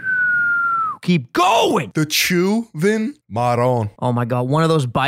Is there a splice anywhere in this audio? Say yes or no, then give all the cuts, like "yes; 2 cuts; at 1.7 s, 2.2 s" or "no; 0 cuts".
yes; 3 cuts; at 1.8 s, 3.2 s, 3.9 s